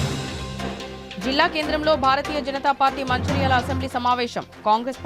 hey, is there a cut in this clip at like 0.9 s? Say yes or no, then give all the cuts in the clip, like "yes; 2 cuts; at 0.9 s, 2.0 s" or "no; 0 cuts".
yes; 1 cut; at 0.9 s